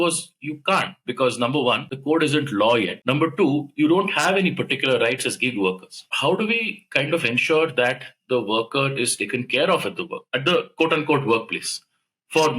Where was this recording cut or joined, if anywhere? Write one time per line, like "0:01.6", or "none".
0:01.9
0:03.0
0:06.0